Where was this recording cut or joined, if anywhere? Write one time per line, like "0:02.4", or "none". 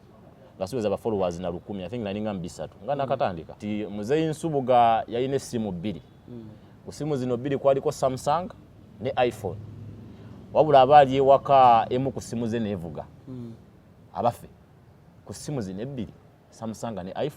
0:03.6